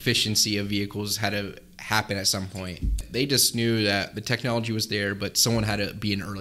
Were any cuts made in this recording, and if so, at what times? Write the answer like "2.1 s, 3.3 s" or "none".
3.0 s